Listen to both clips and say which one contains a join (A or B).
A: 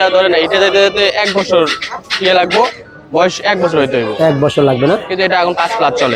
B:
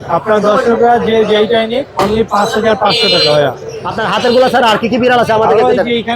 B